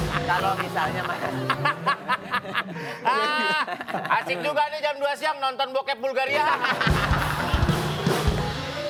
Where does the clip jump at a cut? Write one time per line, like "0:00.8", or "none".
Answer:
none

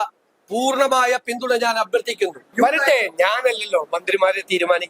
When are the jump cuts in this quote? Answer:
0:02.4

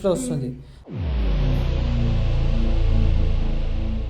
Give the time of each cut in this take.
none

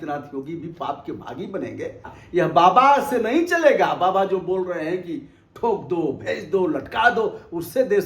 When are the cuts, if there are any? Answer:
0:02.1

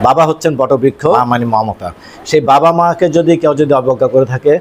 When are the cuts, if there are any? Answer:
0:01.2

